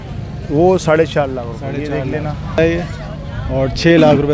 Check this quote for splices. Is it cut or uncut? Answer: cut